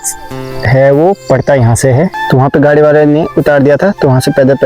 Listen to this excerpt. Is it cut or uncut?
cut